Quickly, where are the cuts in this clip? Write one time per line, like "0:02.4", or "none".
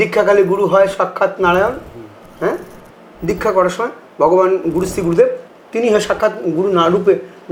none